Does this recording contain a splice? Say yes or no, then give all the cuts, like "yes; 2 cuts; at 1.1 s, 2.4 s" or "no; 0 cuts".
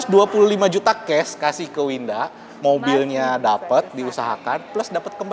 no; 0 cuts